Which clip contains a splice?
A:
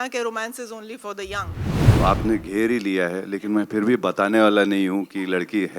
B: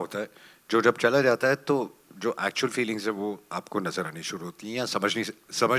A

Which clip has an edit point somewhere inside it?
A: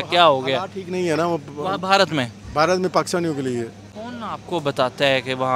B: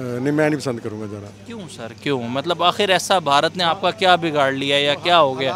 A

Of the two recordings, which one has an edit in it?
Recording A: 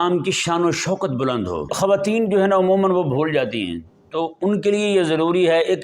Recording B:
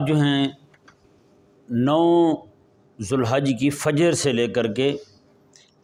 A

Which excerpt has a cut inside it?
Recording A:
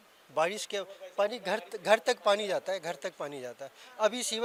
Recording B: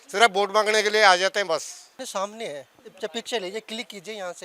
B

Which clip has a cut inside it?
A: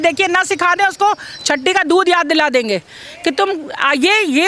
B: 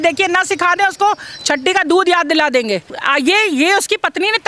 B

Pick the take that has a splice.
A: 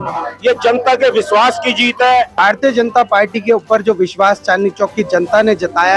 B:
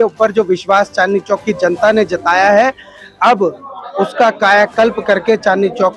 A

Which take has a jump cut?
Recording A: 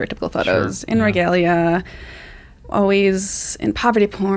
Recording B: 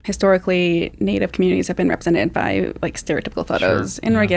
B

